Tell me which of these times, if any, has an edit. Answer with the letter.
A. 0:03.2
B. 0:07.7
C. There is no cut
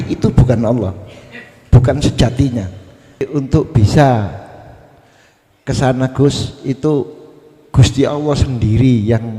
A